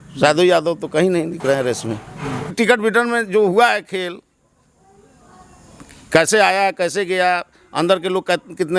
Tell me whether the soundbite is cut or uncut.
cut